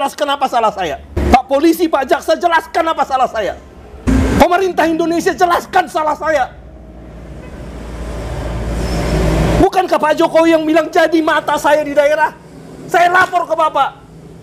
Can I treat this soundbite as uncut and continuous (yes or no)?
yes